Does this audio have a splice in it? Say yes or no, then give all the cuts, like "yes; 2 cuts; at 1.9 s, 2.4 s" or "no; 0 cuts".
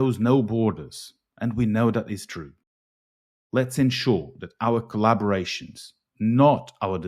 no; 0 cuts